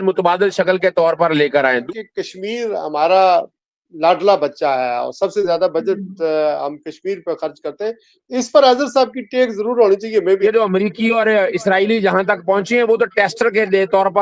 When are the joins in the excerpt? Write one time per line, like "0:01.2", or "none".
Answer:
0:01.8
0:10.4